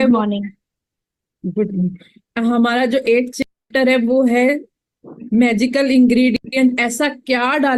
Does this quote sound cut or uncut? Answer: uncut